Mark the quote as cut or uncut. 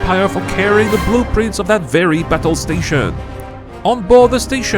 cut